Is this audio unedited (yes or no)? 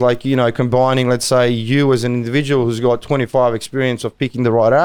yes